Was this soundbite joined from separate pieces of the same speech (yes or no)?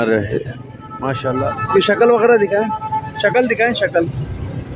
yes